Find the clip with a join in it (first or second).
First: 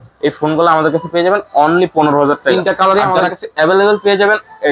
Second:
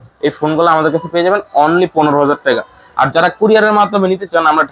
first